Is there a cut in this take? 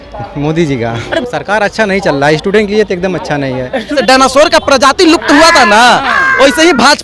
yes; 2 cuts; at 1.2 s, 3.9 s

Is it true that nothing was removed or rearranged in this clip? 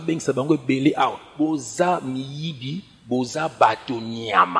no; 1 cut; at 1.2 s

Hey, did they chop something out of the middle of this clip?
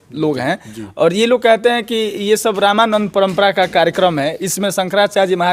no; 0 cuts

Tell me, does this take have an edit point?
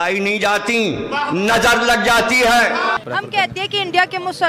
yes; 1 cut; at 3.1 s

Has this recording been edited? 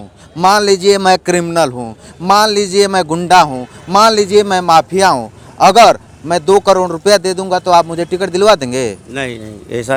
no; 0 cuts

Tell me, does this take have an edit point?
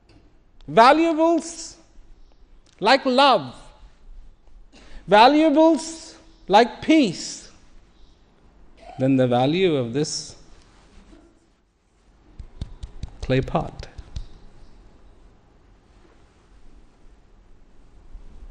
yes; 1 cut; at 8.8 s

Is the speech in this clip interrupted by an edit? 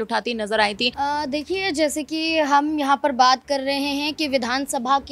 yes; 1 cut; at 1.1 s

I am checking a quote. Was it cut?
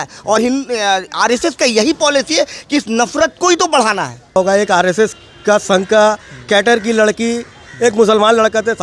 yes; 1 cut; at 4.4 s

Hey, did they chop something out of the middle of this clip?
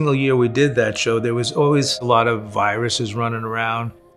no; 0 cuts

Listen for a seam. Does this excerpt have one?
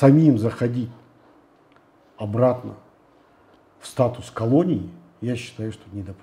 no; 0 cuts

